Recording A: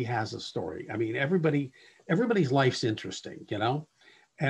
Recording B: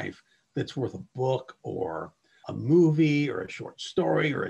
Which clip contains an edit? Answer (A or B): B